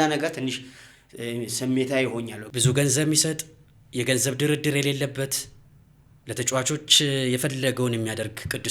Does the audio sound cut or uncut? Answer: cut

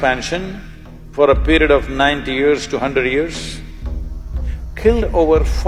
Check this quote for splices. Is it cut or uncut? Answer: uncut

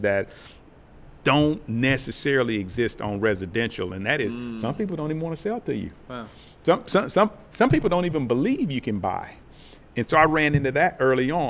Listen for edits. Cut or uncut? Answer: uncut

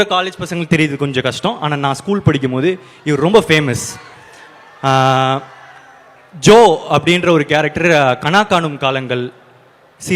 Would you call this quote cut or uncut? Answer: uncut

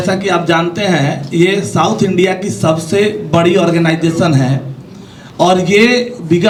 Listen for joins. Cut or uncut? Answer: uncut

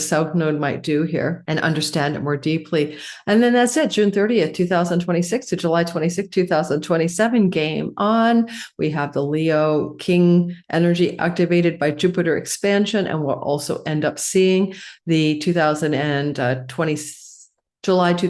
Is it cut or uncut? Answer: uncut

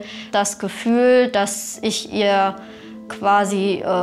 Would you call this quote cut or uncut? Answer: uncut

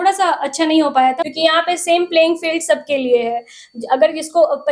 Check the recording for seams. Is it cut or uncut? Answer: cut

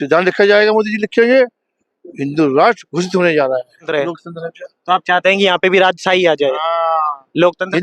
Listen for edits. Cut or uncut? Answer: cut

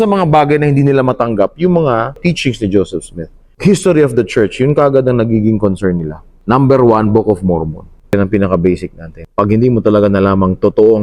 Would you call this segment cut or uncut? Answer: cut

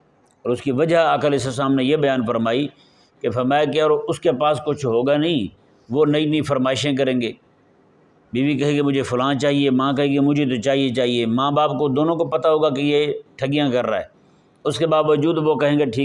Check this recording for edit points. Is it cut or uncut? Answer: uncut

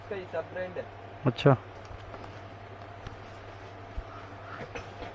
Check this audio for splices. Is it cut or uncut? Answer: cut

